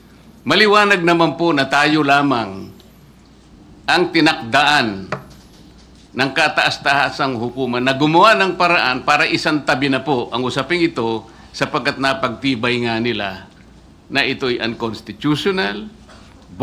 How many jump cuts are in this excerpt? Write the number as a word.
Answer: zero